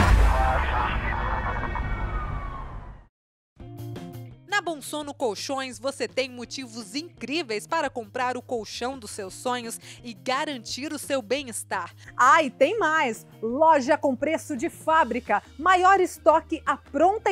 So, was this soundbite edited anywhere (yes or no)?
yes